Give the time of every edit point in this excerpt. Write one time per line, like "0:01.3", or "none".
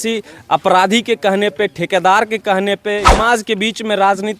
0:03.1